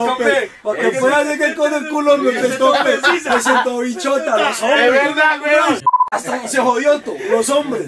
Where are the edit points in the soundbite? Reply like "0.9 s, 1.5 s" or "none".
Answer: 5.8 s